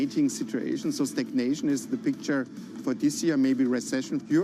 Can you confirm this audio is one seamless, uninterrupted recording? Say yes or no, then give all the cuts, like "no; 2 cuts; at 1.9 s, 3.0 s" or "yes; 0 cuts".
yes; 0 cuts